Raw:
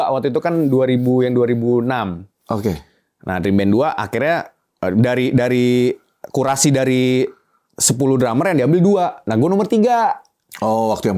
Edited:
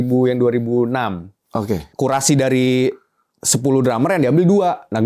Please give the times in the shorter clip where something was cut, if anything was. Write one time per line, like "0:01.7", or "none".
0:01.8